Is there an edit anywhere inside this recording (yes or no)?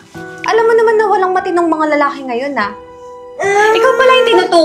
yes